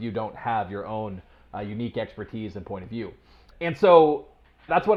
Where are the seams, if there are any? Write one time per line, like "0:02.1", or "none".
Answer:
none